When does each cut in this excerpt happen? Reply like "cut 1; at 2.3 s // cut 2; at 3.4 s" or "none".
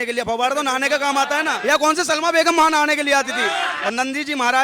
cut 1; at 1.6 s // cut 2; at 3.7 s

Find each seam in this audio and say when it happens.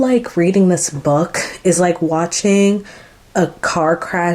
none

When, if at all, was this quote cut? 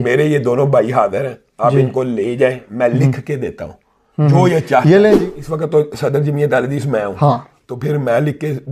cut 1; at 5.2 s

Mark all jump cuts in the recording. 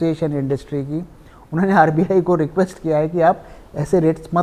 none

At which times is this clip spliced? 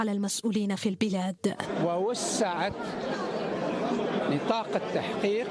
cut 1; at 4.0 s

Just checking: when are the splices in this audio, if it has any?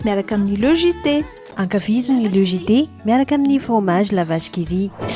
cut 1; at 1.4 s

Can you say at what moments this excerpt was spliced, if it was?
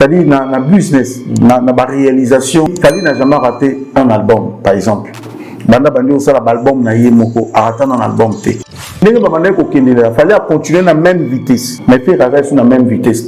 cut 1; at 2.7 s // cut 2; at 9.0 s // cut 3; at 11.7 s

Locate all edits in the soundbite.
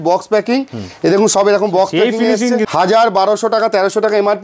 cut 1; at 2.7 s

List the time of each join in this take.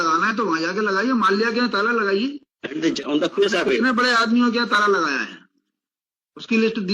cut 1; at 3.0 s

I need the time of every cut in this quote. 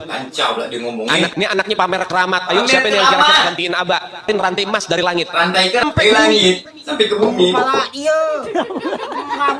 cut 1; at 1.3 s // cut 2; at 4.3 s // cut 3; at 5.8 s

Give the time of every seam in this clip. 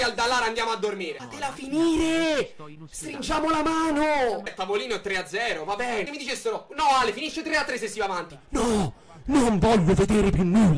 cut 1; at 4.5 s // cut 2; at 6.1 s

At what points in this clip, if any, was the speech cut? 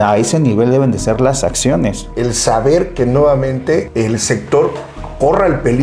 cut 1; at 2.1 s // cut 2; at 3.9 s

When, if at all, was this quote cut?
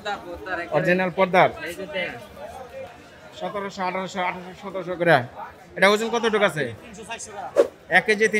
cut 1; at 2.9 s

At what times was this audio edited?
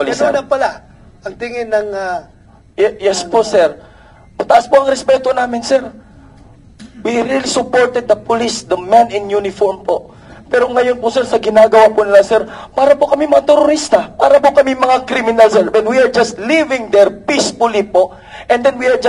none

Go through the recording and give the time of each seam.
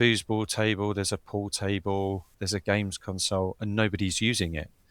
cut 1; at 2.3 s

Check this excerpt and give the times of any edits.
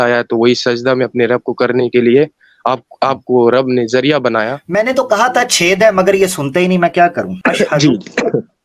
cut 1; at 4.6 s // cut 2; at 7.3 s

